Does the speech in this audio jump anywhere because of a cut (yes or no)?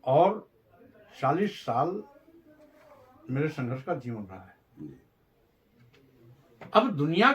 yes